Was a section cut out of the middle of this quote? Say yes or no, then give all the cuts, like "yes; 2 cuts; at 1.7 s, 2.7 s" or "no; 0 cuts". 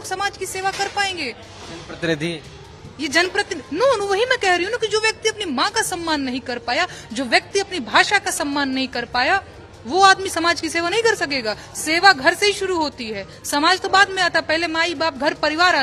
no; 0 cuts